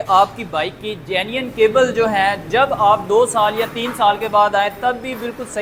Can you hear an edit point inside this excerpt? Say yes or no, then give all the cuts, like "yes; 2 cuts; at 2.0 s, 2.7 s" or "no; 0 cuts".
no; 0 cuts